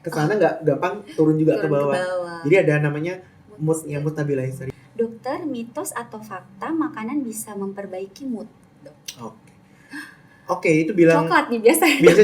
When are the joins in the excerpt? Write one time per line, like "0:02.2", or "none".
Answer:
0:04.6

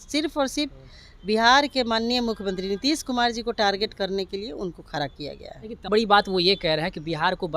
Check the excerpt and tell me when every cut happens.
0:05.9

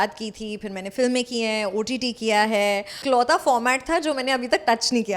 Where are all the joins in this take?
0:02.9

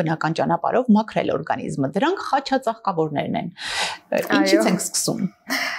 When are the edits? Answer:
none

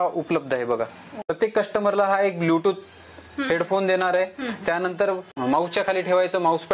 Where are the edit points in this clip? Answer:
0:01.3
0:05.3

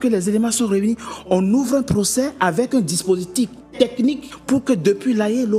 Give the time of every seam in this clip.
0:04.1

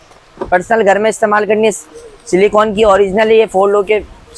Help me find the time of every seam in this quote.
none

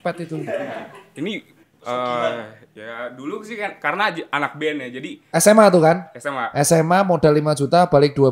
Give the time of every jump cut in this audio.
none

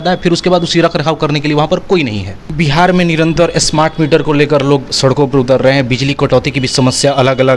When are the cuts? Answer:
0:02.7

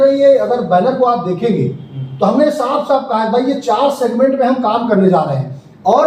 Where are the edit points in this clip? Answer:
none

